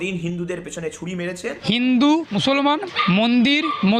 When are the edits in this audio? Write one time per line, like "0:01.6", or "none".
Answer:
0:01.6
0:02.6